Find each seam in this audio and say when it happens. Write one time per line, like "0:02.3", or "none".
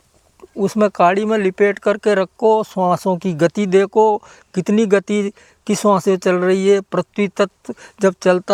none